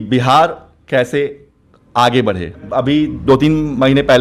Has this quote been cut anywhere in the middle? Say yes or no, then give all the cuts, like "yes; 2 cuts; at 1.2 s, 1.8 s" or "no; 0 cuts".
yes; 1 cut; at 2.6 s